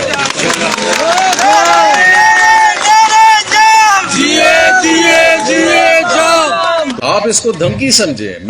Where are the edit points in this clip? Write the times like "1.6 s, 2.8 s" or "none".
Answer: 6.9 s

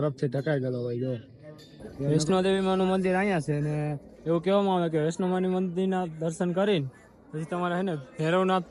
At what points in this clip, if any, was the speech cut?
2.1 s

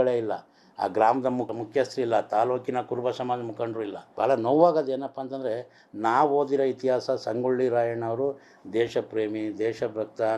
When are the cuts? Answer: 1.5 s, 4.0 s

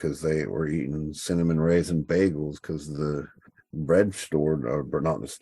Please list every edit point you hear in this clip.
3.4 s

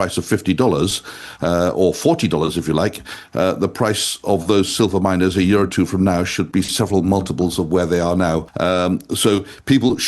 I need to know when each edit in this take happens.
8.5 s

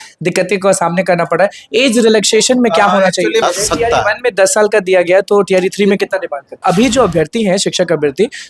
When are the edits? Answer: 3.4 s, 6.6 s

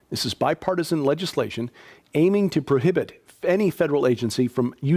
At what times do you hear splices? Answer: 3.2 s

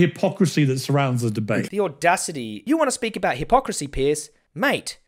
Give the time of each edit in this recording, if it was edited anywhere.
2.5 s

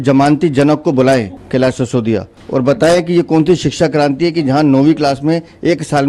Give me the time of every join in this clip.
1.4 s, 2.4 s

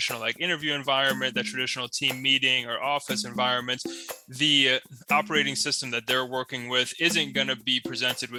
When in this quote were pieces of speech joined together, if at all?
none

